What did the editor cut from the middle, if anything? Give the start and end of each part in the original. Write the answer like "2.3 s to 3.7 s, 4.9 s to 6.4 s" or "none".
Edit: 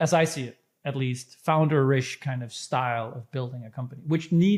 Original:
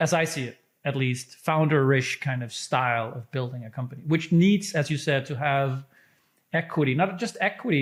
none